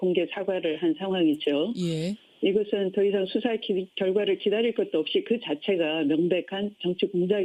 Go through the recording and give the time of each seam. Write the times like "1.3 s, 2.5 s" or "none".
2.7 s